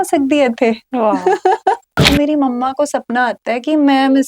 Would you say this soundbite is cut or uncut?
cut